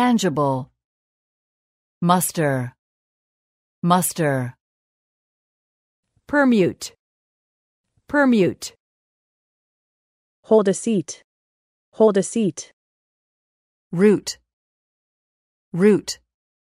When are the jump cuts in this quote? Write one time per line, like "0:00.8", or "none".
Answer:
none